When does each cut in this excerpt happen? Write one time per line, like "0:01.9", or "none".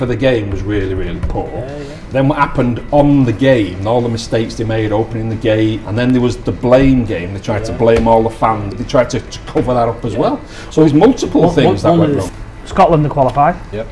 0:05.8
0:08.8
0:12.2